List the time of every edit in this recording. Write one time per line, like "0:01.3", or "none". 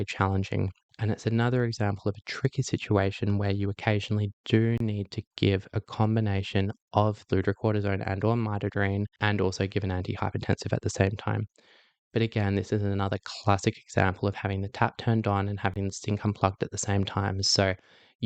0:07.2
0:09.1

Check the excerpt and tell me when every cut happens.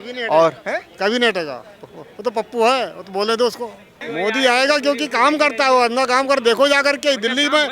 0:03.9

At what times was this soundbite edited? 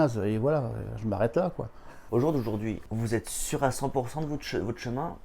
0:01.9
0:02.8

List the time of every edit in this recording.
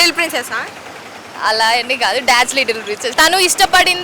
0:03.1

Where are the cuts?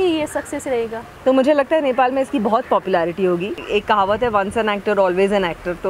0:01.0
0:03.6

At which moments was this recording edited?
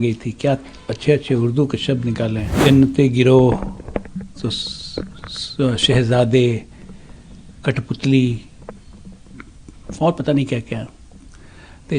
0:02.5

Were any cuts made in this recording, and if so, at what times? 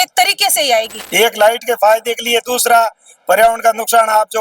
0:01.0

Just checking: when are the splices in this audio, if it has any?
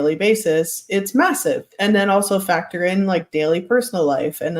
0:01.7

